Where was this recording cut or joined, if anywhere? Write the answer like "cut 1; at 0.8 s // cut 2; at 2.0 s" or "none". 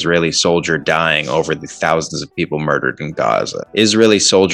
cut 1; at 3.6 s

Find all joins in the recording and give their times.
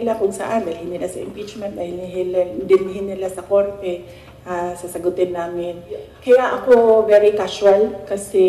cut 1; at 6.1 s

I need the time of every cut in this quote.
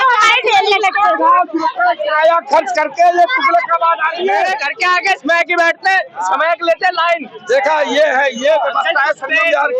cut 1; at 4.6 s

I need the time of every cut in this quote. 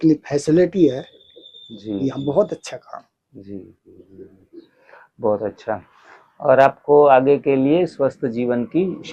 none

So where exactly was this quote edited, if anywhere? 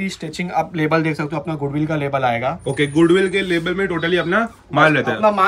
none

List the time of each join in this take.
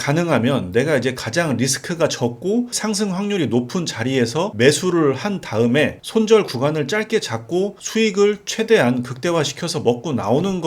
cut 1; at 2.7 s

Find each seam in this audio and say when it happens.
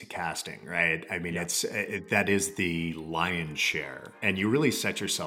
cut 1; at 3.0 s

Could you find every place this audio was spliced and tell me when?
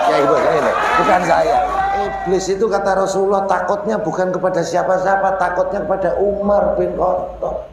cut 1; at 2.0 s

